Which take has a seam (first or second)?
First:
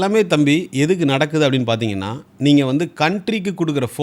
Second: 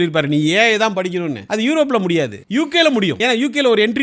second